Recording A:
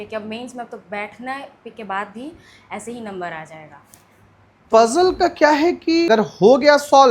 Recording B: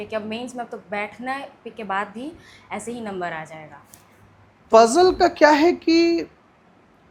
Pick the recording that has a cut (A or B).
A